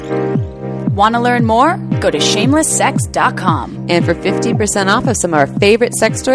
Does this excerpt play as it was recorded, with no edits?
no; 1 cut; at 0.9 s

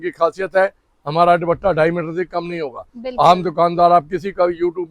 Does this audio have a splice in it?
no; 0 cuts

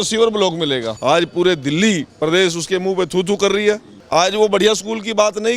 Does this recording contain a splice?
yes; 2 cuts; at 0.9 s, 3.9 s

